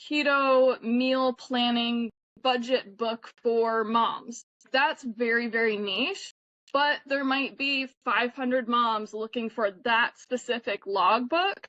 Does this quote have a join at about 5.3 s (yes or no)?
no